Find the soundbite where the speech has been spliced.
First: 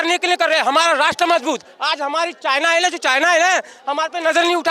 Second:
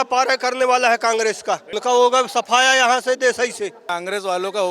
second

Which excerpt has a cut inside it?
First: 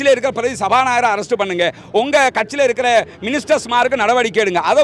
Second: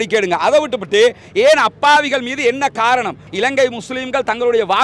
second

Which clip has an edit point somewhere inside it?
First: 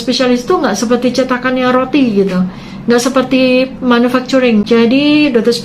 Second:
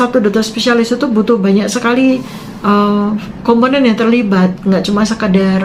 first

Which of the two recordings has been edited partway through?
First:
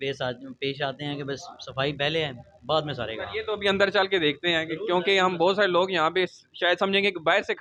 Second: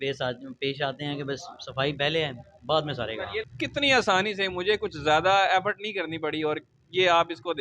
second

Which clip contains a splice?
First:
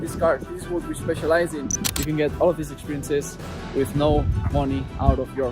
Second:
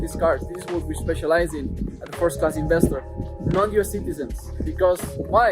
first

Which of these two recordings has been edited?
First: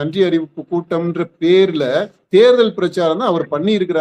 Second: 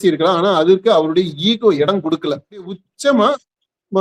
second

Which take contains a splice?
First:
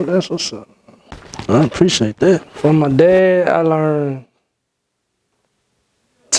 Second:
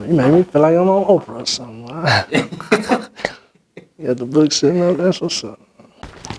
first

